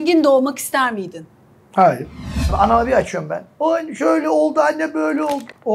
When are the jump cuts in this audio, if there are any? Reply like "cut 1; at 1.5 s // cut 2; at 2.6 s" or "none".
cut 1; at 2.5 s

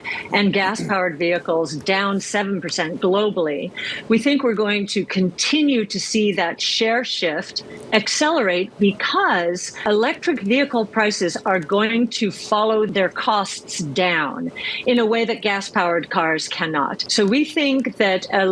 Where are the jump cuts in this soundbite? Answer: cut 1; at 9.8 s // cut 2; at 12.9 s // cut 3; at 17.0 s

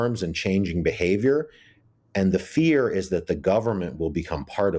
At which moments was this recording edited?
none

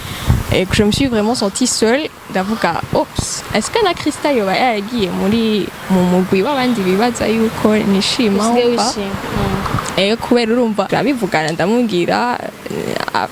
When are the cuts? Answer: cut 1; at 10.9 s

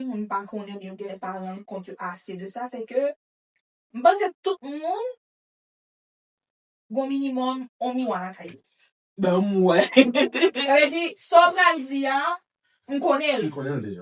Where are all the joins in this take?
none

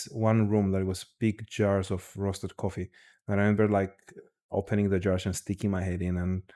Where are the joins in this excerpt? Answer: none

